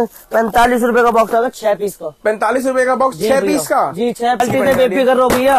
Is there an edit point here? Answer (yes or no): yes